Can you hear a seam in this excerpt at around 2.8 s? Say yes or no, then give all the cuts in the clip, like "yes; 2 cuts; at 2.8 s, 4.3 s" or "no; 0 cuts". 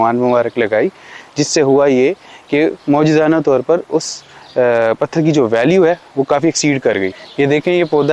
no; 1 cut; at 7.2 s